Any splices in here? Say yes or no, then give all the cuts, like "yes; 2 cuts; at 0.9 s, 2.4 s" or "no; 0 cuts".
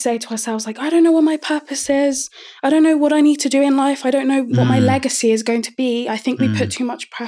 yes; 1 cut; at 4.5 s